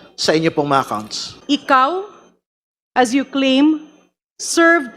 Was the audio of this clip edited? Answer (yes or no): yes